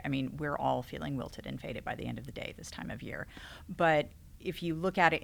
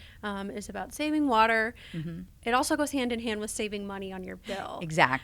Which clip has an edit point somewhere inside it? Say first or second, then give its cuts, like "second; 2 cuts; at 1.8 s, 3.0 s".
second; 1 cut; at 2.2 s